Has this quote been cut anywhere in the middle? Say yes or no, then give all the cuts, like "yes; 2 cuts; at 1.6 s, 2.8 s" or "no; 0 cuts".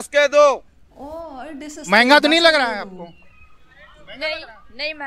no; 0 cuts